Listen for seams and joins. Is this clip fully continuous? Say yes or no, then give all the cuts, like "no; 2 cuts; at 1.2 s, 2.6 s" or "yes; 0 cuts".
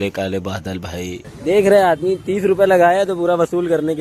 no; 1 cut; at 1.3 s